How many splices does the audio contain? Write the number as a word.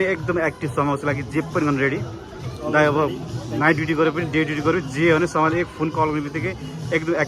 zero